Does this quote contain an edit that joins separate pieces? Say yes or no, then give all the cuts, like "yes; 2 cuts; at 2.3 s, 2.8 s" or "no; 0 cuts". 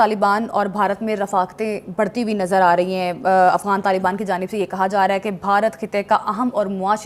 no; 0 cuts